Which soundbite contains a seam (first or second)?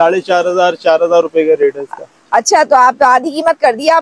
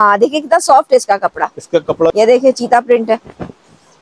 second